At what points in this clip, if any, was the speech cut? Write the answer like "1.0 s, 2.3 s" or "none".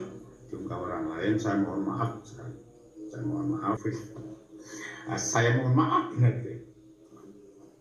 3.8 s